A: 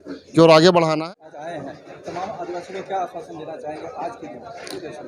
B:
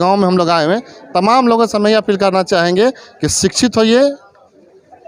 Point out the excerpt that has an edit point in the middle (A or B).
A